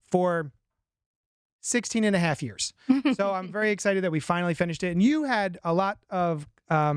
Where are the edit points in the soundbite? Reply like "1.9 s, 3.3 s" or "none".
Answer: none